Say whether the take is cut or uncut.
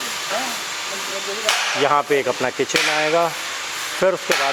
uncut